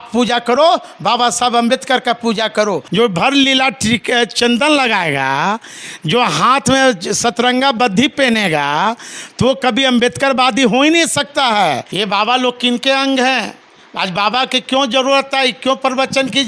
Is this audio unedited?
no; 2 cuts; at 2.8 s, 11.9 s

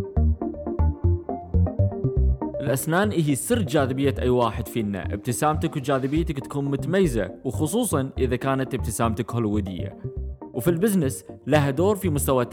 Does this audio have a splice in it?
yes; 1 cut; at 2.6 s

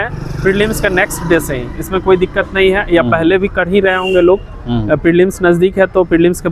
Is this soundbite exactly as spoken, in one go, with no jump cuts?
yes; 0 cuts

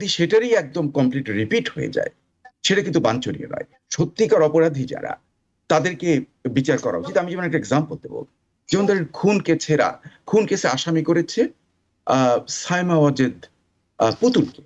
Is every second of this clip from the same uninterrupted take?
yes; 0 cuts

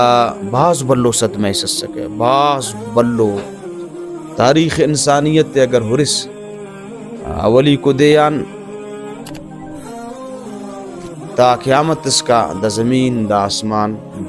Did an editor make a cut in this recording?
no; 0 cuts

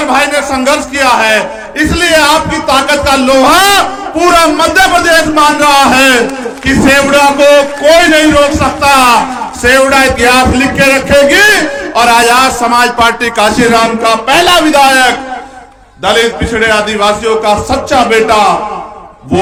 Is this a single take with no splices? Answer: yes; 0 cuts

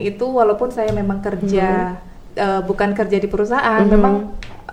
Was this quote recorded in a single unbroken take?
yes; 0 cuts

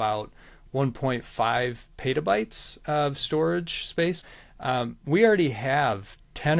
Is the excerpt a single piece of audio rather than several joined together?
no; 1 cut; at 4.2 s

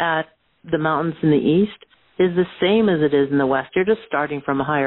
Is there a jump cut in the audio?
no; 0 cuts

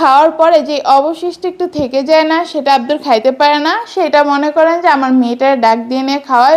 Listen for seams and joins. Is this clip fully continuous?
yes; 0 cuts

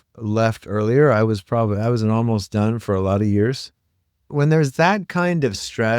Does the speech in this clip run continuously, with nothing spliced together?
no; 1 cut; at 4.3 s

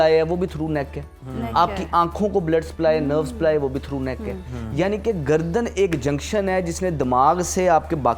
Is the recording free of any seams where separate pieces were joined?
yes; 0 cuts

